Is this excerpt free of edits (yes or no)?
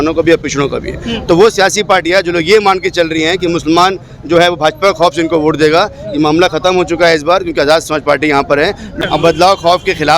no